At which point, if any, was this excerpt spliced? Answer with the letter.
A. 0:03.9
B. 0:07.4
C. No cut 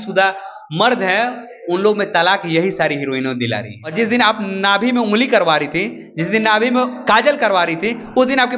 A